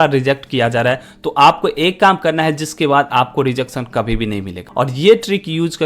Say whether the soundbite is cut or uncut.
cut